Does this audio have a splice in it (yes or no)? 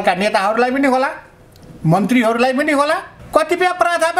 yes